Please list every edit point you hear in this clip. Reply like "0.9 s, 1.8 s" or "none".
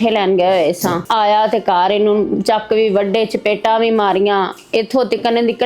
1.0 s